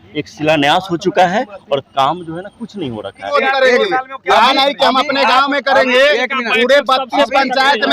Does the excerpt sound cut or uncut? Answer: cut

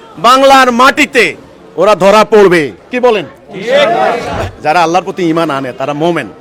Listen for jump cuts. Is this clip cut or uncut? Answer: uncut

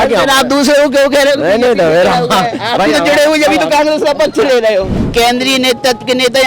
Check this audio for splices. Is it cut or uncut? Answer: cut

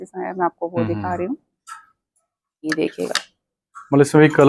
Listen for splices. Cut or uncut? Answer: uncut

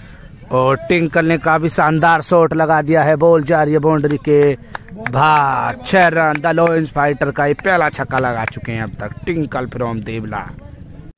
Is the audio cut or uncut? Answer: uncut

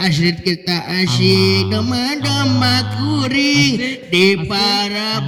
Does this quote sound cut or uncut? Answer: uncut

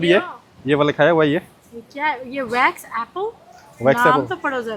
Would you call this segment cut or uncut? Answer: uncut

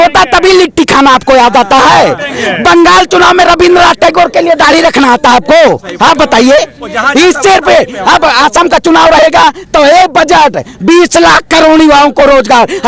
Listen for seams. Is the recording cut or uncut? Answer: uncut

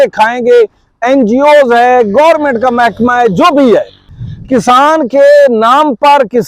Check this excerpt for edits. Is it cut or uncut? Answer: cut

